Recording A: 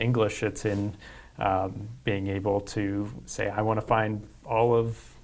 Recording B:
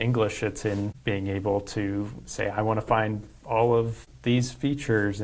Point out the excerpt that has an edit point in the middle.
B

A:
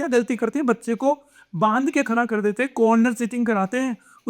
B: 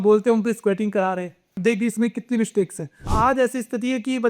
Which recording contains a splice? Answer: B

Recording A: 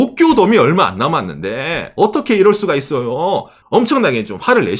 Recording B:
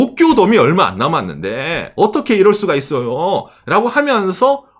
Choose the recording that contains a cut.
A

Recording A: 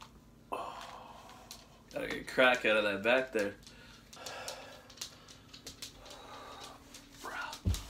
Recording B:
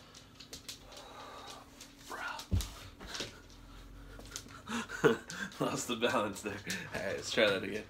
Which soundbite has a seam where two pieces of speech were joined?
A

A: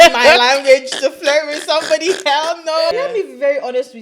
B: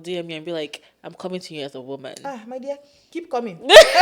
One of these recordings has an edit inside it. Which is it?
A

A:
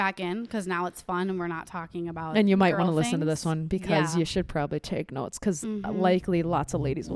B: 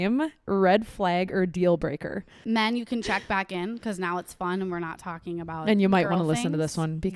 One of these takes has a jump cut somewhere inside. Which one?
B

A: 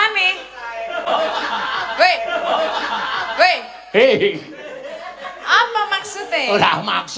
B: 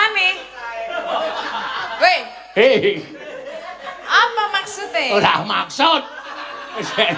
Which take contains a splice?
B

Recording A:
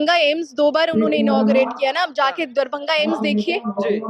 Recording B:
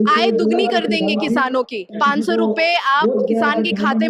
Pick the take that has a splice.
B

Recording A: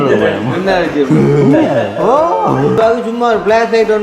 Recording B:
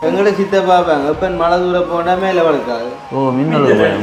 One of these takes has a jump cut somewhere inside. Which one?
A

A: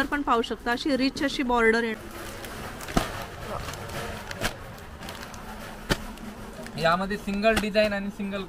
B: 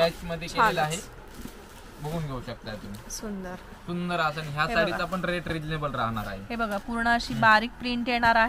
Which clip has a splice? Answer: A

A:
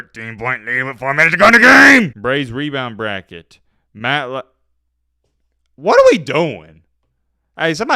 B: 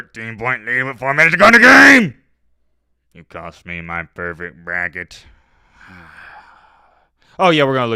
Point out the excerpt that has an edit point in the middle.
A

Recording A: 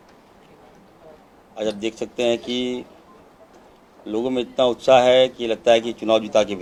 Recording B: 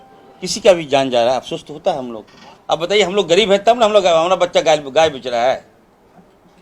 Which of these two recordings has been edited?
B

